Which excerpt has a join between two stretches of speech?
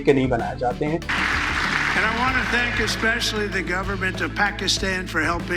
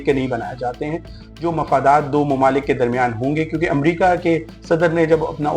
first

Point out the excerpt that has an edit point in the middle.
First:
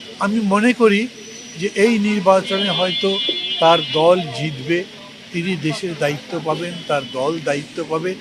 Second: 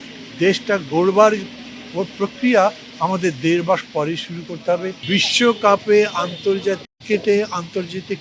second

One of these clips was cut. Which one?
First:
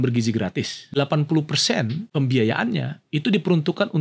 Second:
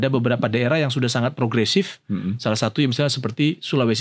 first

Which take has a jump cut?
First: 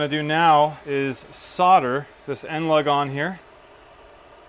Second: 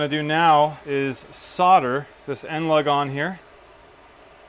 first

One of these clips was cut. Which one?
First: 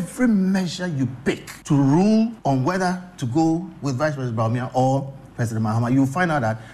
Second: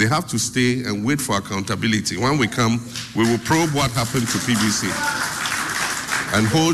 first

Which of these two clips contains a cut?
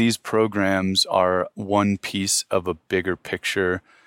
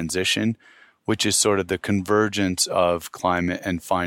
second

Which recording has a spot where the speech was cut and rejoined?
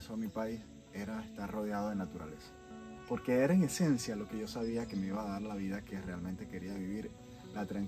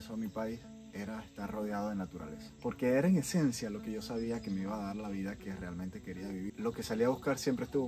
second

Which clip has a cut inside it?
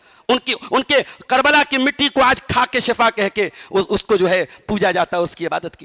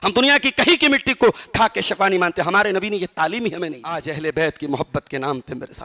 second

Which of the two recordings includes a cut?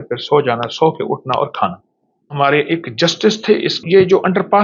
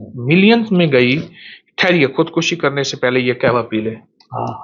first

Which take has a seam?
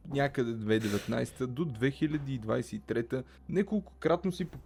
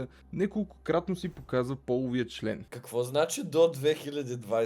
second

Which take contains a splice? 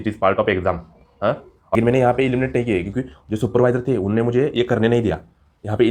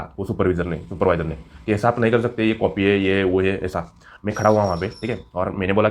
first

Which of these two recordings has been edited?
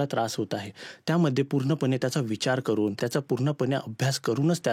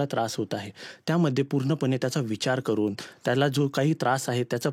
first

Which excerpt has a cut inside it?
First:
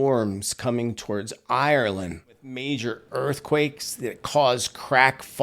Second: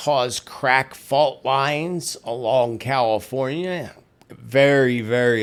first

